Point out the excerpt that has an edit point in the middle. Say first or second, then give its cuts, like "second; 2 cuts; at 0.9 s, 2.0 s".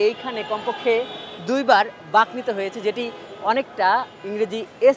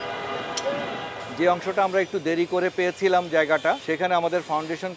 second; 2 cuts; at 1.2 s, 3.8 s